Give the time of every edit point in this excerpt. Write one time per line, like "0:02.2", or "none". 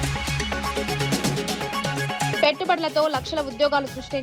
0:02.4